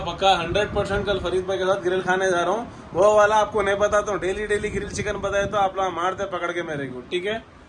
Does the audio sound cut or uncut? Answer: uncut